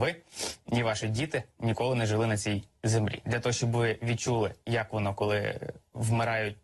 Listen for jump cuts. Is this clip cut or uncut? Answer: uncut